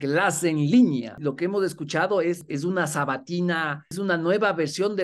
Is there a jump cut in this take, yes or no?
yes